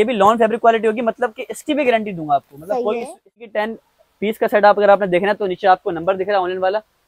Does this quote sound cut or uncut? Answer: cut